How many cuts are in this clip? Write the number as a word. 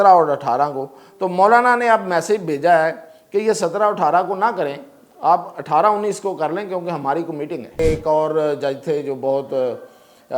one